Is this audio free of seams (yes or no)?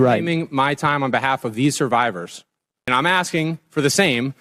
no